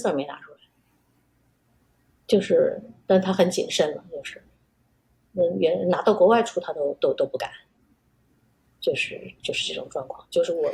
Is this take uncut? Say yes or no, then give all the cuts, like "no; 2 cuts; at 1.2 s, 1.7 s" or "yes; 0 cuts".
yes; 0 cuts